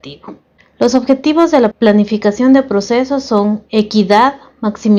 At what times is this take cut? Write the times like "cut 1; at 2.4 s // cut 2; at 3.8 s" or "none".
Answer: none